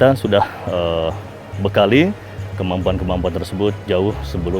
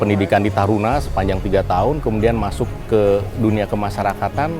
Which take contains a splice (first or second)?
second